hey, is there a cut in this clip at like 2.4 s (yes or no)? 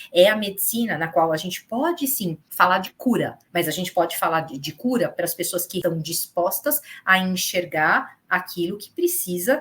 yes